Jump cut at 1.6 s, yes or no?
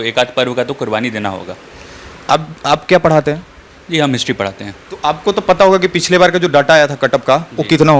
no